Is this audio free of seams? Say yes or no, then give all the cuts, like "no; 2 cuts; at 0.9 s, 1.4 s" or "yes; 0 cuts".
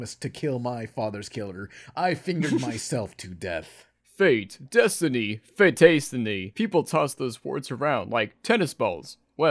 no; 1 cut; at 6.4 s